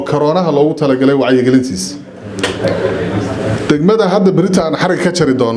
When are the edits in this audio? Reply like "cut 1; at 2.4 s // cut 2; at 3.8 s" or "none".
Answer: cut 1; at 2.2 s